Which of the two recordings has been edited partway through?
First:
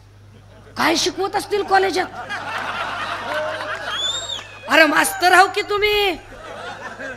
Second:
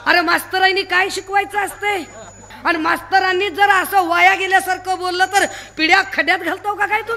second; 1 cut; at 2.5 s

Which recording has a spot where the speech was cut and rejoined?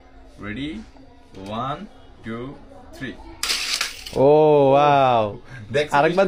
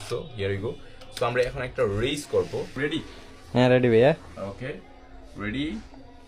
second; 1 cut; at 2.7 s

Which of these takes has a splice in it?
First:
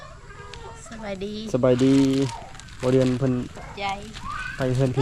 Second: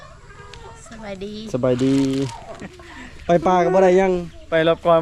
second; 1 cut; at 2.7 s

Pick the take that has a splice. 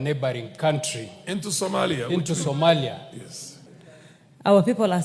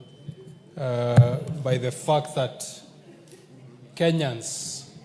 first; 1 cut; at 3.5 s

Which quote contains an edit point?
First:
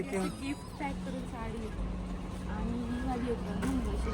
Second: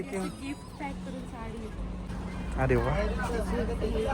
second; 1 cut; at 2.1 s

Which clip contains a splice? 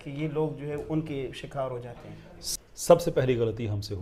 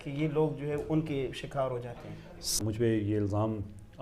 second; 1 cut; at 2.6 s

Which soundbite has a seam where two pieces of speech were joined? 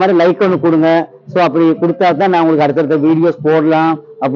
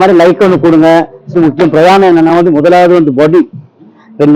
second; 1 cut; at 1.3 s

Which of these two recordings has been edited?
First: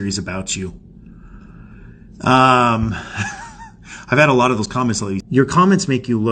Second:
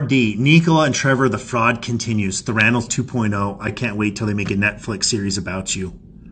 first; 1 cut; at 5.2 s

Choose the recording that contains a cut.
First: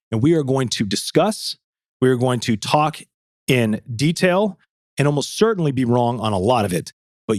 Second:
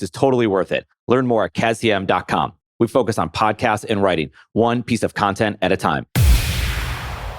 second; 1 cut; at 6.2 s

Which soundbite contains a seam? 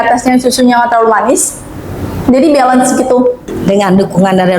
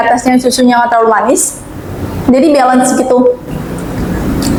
first; 1 cut; at 3.5 s

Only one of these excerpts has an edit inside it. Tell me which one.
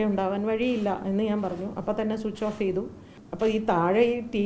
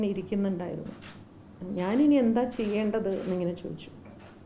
first; 1 cut; at 3.2 s

